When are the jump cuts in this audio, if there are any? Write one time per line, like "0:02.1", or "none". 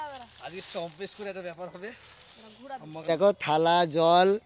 none

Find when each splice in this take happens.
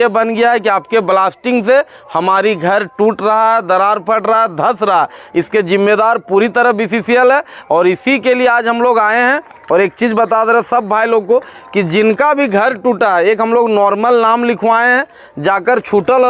none

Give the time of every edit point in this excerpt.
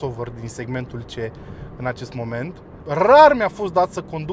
0:02.7

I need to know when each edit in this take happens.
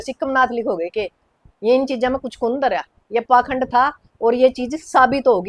none

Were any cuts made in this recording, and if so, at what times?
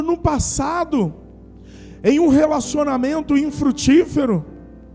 none

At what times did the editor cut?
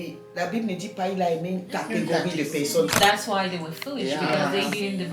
0:03.0

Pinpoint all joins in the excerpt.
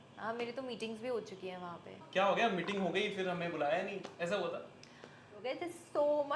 0:02.0
0:05.4

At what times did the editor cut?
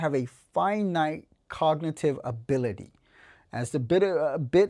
none

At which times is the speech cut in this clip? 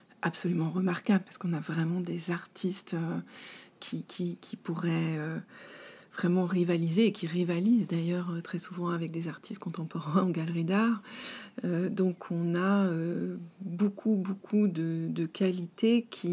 none

